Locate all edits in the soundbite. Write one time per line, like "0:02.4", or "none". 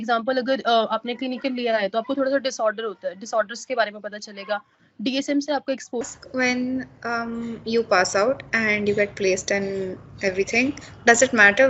0:06.1

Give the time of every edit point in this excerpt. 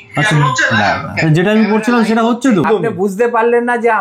0:02.7

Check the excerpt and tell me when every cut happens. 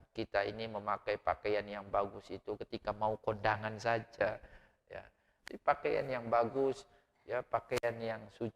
0:04.2

